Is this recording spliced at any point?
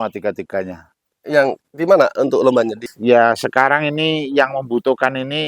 yes; 1 cut; at 2.8 s

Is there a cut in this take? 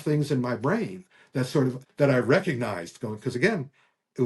yes; 1 cut; at 1.8 s

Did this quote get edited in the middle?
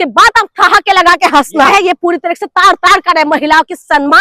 yes; 1 cut; at 1.7 s

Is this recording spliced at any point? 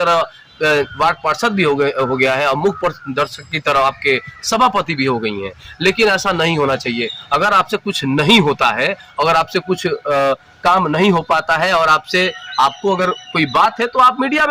no; 0 cuts

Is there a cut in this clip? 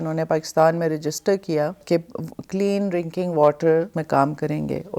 yes; 2 cuts; at 1.8 s, 4.0 s

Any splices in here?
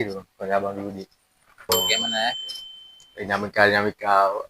yes; 1 cut; at 1.7 s

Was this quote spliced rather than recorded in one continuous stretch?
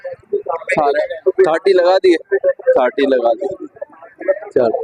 yes; 1 cut; at 1.1 s

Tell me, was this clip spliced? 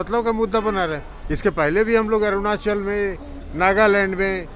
no; 0 cuts

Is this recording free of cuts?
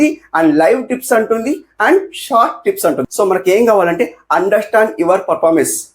no; 1 cut; at 3.1 s

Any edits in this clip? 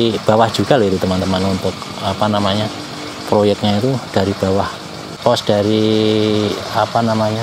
yes; 1 cut; at 5.2 s

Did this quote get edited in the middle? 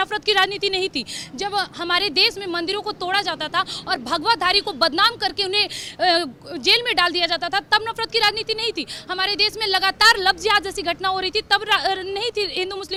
no; 0 cuts

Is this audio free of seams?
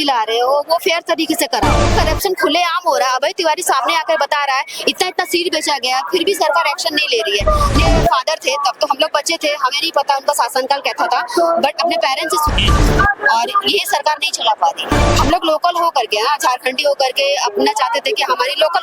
no; 4 cuts; at 1.9 s, 7.8 s, 12.5 s, 15.0 s

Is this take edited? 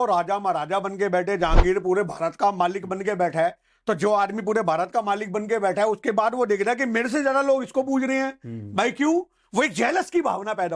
no; 0 cuts

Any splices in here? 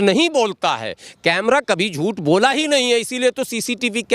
no; 0 cuts

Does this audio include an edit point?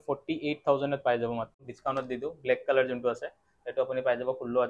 yes; 1 cut; at 1.7 s

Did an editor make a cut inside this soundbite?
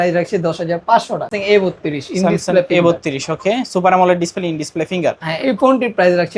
yes; 1 cut; at 1.3 s

